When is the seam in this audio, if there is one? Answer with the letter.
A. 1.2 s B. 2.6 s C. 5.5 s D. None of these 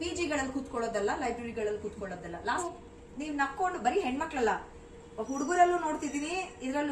B